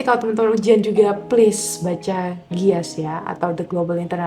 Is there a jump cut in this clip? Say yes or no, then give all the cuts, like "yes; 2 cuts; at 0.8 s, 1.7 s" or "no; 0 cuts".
no; 0 cuts